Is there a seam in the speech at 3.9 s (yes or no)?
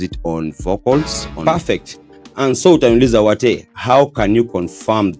no